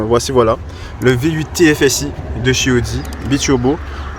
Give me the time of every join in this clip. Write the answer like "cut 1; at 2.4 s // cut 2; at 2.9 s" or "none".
none